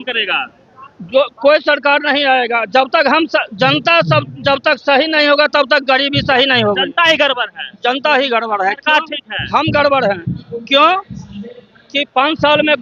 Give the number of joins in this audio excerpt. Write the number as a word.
zero